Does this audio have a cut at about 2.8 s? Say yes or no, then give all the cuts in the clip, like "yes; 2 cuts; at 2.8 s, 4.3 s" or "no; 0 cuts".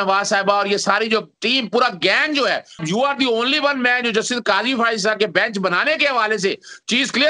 yes; 1 cut; at 2.8 s